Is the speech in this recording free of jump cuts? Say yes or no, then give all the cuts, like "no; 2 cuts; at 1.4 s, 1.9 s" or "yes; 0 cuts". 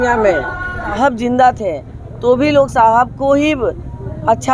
no; 1 cut; at 0.9 s